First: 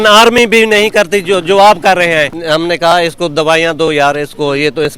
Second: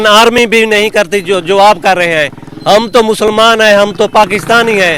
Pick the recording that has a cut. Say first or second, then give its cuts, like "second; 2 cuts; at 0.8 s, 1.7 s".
first; 1 cut; at 2.4 s